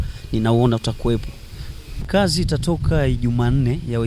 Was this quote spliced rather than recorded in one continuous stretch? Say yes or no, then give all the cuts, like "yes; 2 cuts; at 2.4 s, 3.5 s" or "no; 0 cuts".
yes; 1 cut; at 2.1 s